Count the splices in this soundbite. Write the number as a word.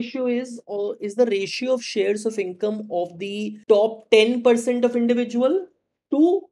one